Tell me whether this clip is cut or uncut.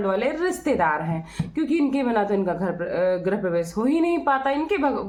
uncut